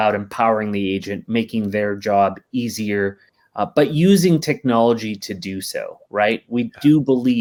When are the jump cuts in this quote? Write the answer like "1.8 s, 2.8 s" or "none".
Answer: none